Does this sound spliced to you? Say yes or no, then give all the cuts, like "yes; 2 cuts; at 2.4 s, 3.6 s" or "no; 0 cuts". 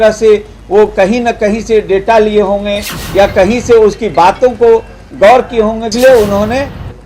yes; 1 cut; at 5.9 s